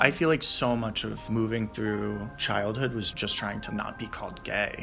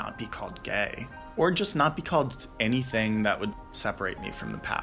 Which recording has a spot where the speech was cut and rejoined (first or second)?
first